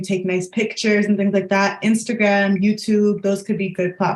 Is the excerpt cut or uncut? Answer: uncut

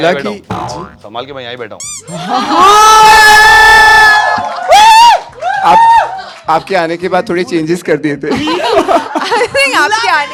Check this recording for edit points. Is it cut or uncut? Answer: uncut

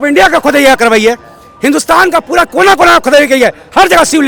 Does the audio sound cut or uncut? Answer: uncut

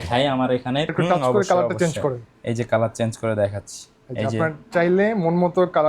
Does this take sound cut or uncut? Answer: cut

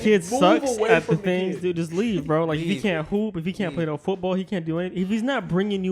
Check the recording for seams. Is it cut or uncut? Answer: uncut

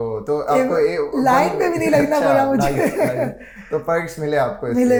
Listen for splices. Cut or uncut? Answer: uncut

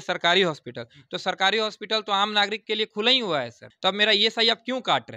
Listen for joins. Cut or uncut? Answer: cut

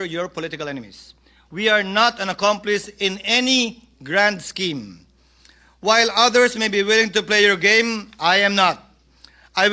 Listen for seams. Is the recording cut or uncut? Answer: uncut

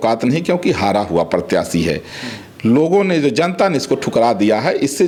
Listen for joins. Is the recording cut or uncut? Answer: uncut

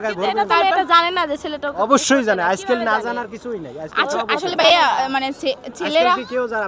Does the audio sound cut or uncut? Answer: uncut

